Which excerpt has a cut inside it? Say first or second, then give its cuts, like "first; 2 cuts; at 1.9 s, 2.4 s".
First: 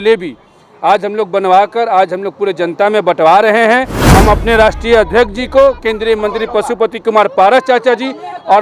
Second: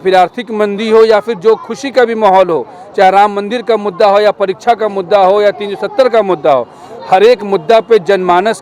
first; 1 cut; at 4.0 s